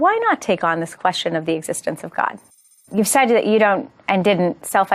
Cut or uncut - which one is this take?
cut